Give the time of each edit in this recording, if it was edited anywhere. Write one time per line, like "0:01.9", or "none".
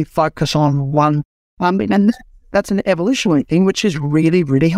0:01.7